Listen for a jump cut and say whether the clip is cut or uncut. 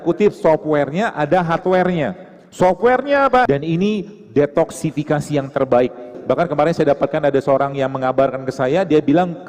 cut